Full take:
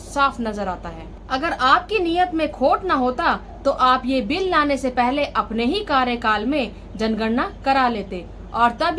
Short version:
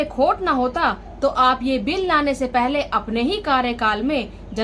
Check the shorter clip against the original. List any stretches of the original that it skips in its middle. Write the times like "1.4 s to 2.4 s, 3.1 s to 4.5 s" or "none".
none